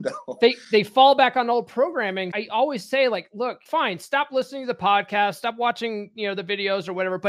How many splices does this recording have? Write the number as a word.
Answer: two